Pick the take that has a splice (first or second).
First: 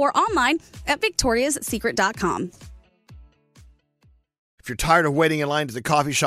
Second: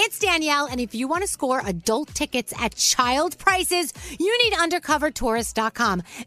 first